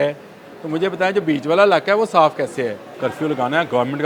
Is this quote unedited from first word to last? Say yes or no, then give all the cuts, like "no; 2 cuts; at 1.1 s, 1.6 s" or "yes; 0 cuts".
no; 1 cut; at 2.8 s